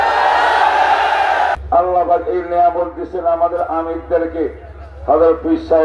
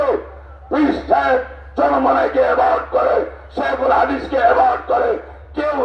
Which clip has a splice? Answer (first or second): first